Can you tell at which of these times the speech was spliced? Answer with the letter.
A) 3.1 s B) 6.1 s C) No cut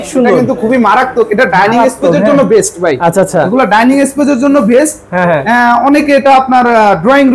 C